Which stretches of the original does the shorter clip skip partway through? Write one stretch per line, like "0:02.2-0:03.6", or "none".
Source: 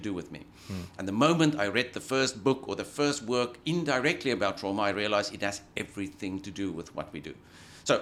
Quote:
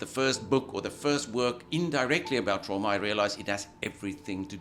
none